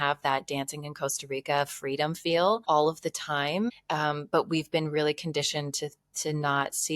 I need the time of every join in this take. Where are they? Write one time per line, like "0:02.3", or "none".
0:02.6
0:03.8